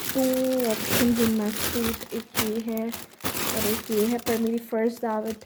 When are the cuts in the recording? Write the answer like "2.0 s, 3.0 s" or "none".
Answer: none